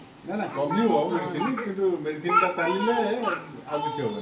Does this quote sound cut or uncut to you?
uncut